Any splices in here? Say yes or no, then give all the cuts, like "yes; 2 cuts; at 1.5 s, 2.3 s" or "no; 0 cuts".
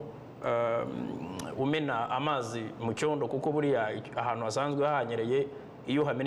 no; 0 cuts